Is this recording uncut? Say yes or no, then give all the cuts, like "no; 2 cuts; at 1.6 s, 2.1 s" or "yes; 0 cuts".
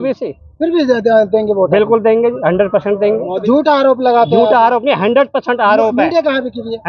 yes; 0 cuts